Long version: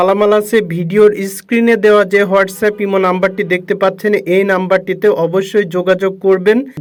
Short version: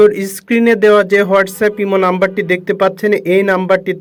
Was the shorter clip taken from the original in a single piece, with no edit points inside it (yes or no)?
yes